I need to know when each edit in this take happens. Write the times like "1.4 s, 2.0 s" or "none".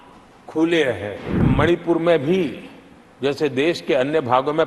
1.5 s